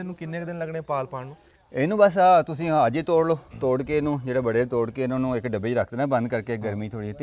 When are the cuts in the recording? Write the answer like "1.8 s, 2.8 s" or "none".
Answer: none